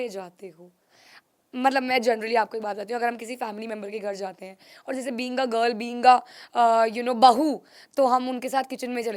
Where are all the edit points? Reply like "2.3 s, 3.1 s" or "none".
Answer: none